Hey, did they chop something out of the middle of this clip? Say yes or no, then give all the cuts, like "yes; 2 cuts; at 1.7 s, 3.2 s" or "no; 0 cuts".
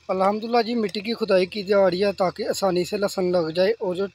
no; 0 cuts